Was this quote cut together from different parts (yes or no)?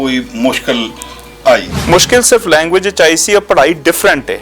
yes